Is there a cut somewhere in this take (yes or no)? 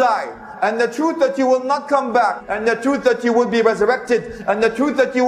yes